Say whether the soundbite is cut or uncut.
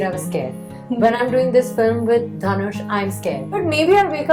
cut